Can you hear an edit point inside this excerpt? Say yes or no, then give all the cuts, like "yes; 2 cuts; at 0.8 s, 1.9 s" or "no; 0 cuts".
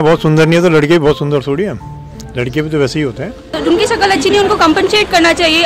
yes; 1 cut; at 3.5 s